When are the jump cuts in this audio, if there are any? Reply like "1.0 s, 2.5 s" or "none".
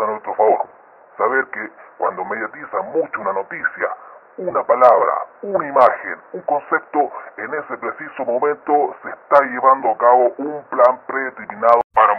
5.7 s